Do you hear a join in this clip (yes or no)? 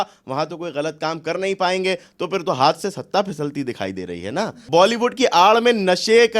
yes